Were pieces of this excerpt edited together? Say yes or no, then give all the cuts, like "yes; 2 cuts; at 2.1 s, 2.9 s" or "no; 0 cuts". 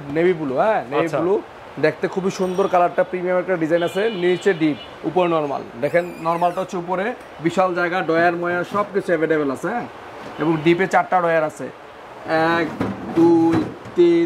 no; 0 cuts